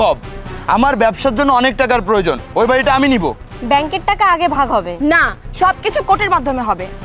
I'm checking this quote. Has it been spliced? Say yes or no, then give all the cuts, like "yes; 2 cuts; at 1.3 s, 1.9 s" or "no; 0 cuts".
no; 0 cuts